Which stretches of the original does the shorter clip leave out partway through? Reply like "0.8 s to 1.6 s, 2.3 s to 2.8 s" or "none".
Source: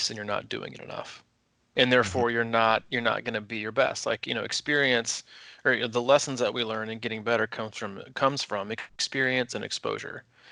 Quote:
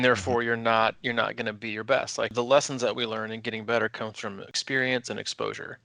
4.2 s to 5.9 s, 8.0 s to 8.9 s